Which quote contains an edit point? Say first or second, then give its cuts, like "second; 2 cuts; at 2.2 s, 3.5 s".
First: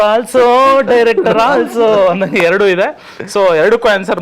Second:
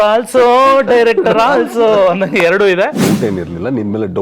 second; 1 cut; at 3.0 s